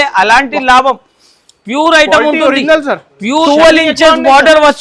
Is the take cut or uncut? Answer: cut